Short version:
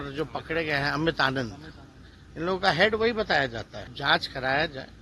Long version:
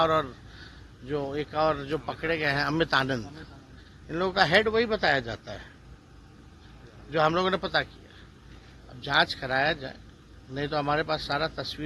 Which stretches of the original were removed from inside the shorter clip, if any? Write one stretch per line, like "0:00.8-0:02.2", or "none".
0:05.5-0:08.9